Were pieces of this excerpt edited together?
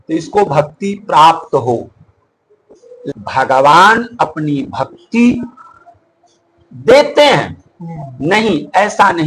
yes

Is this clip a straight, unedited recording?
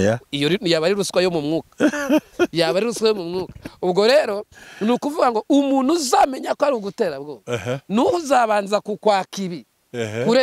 yes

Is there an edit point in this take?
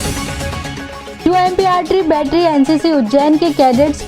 yes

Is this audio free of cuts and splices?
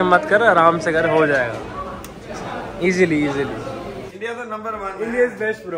no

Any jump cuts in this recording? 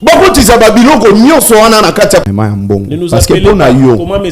yes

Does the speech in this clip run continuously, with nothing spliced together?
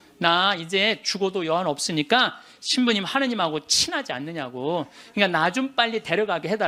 yes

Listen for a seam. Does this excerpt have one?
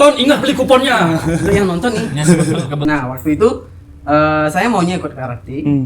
yes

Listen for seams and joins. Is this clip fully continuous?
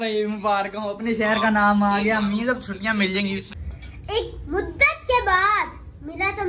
no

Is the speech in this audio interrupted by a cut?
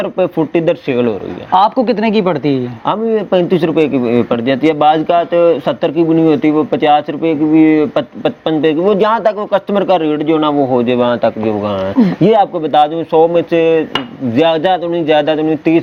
no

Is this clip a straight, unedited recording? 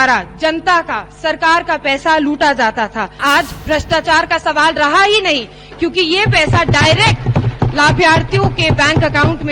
no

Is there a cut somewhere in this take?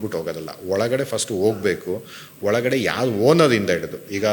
no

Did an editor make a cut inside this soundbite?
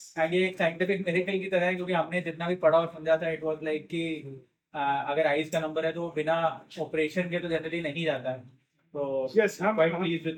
no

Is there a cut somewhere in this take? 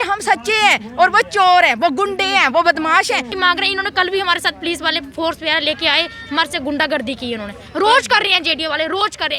yes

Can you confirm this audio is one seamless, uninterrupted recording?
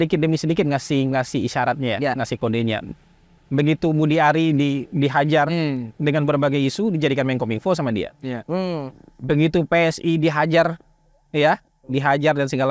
yes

